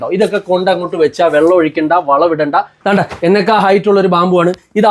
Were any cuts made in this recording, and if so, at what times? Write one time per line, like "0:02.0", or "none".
0:02.7